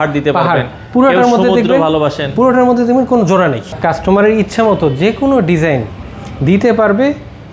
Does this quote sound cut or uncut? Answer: cut